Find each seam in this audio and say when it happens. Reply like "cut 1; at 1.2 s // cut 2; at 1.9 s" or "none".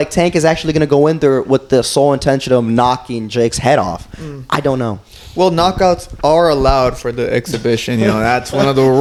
none